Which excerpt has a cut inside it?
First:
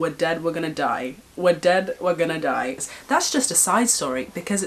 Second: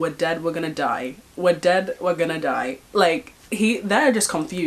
first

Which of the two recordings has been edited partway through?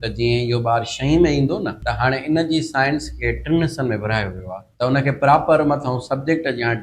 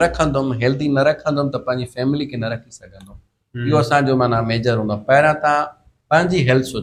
first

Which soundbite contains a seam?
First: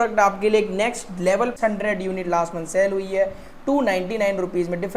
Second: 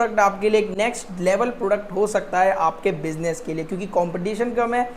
first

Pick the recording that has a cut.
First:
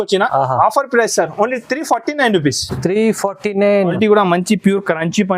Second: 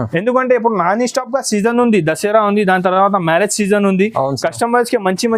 first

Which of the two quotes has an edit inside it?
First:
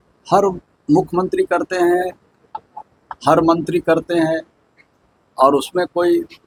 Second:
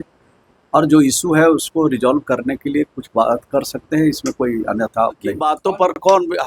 second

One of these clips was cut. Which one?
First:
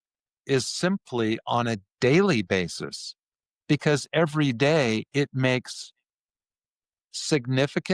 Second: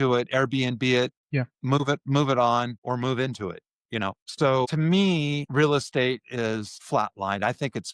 second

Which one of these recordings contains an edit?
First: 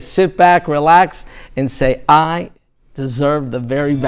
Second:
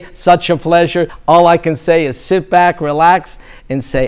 second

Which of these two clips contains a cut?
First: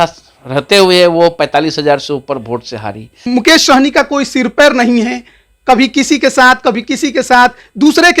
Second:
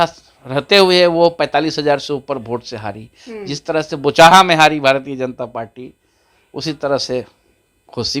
first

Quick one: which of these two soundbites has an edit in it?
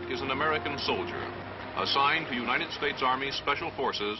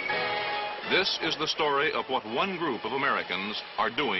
second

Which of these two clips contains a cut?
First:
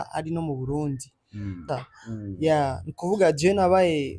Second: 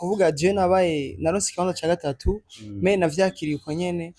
first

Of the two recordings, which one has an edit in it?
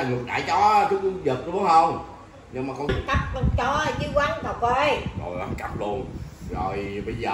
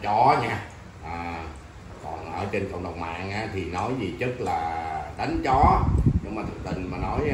first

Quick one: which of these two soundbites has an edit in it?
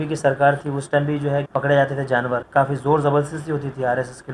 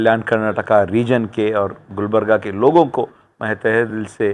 first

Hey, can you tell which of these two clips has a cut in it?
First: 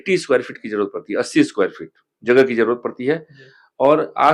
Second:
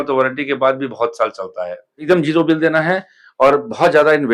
second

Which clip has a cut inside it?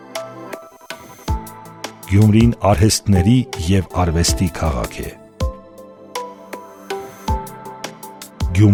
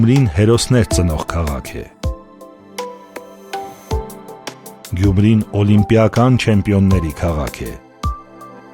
second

